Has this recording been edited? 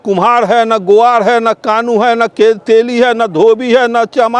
no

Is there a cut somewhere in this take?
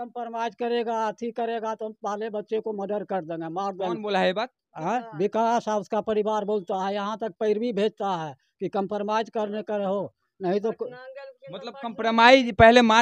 no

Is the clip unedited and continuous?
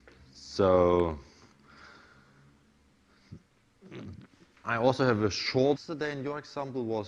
yes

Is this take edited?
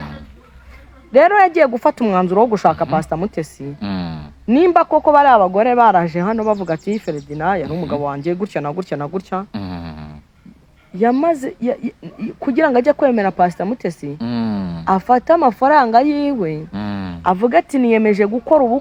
no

